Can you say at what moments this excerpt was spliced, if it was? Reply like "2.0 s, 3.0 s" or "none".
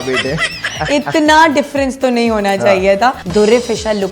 3.2 s